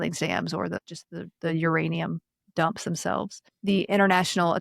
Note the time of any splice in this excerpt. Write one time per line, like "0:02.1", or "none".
0:00.8
0:03.4